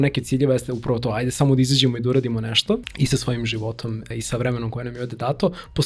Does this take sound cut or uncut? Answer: cut